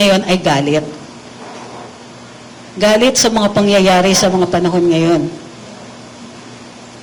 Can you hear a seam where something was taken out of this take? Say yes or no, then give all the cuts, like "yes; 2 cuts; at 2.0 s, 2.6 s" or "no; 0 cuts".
no; 0 cuts